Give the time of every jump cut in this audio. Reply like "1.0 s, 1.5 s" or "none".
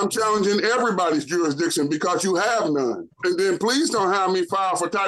3.1 s